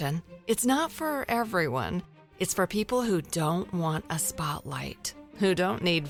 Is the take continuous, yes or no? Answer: yes